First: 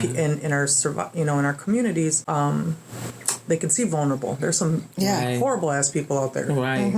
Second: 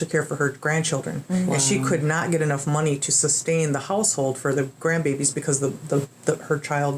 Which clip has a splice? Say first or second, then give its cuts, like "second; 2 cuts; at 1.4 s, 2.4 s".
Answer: first; 1 cut; at 2.2 s